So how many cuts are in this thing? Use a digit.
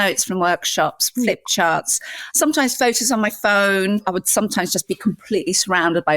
2